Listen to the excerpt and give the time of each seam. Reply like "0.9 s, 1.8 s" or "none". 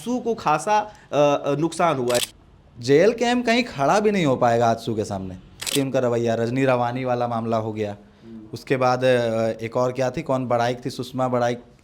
2.2 s, 5.7 s